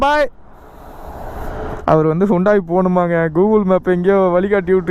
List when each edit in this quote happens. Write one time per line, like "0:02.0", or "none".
0:01.7